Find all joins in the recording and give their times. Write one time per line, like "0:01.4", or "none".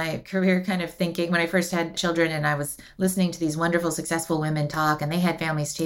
0:02.0